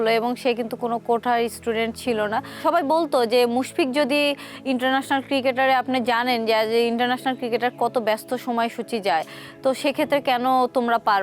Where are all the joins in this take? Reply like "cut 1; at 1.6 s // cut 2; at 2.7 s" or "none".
none